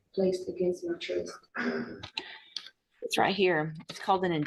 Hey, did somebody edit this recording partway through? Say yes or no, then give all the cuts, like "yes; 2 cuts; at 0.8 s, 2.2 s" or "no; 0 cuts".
no; 0 cuts